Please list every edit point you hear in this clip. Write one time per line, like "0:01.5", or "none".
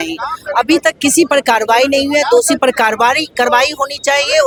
none